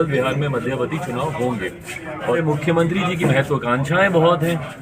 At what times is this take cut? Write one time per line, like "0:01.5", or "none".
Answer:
0:02.3